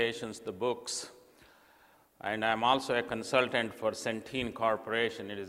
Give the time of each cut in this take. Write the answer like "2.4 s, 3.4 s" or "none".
3.7 s